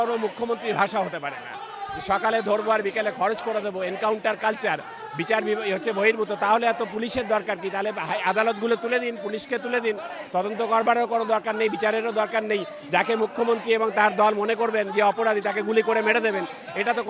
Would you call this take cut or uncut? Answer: uncut